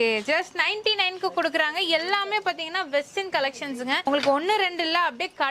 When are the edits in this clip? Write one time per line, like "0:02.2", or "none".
none